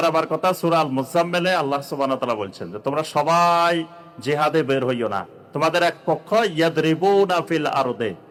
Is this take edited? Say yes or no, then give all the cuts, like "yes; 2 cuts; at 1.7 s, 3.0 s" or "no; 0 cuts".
no; 0 cuts